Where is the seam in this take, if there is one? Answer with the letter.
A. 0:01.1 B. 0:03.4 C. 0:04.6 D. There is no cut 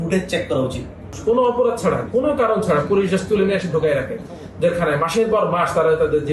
A